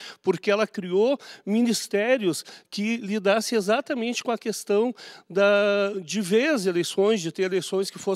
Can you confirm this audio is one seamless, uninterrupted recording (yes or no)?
yes